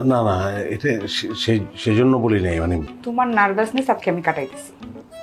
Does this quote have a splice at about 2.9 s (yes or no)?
yes